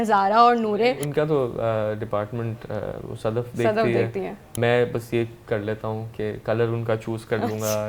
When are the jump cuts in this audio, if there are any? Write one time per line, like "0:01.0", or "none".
0:01.0
0:04.5